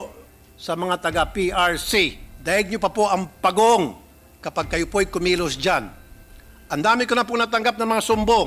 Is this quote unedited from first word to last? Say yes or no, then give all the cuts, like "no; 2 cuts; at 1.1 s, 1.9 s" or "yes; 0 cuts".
no; 1 cut; at 2.3 s